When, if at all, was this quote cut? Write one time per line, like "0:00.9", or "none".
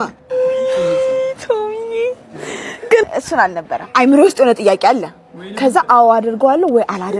none